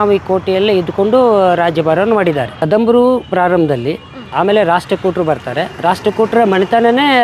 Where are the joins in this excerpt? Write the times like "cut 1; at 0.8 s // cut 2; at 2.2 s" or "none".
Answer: cut 1; at 2.6 s